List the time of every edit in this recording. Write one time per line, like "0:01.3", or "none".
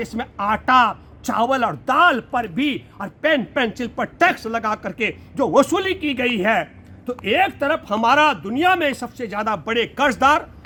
none